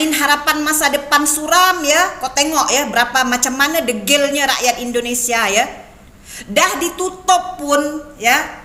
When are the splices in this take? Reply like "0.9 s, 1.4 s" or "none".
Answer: none

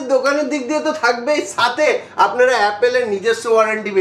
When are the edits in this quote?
none

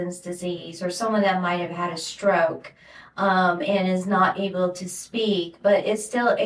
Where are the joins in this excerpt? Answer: none

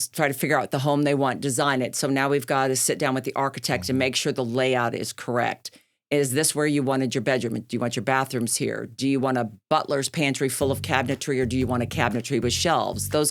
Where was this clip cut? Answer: none

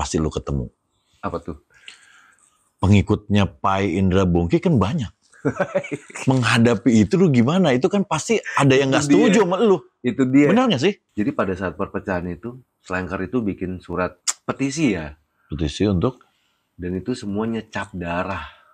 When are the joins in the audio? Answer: 11.1 s, 14.3 s

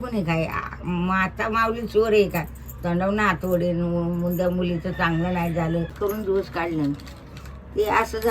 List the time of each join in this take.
5.9 s

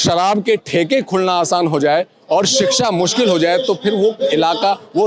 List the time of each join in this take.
none

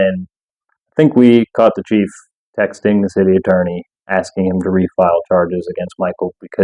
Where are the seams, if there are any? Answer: none

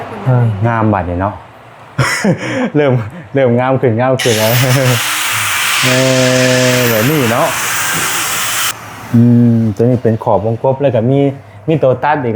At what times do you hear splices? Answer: 8.6 s

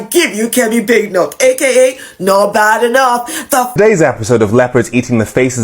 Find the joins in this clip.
3.8 s

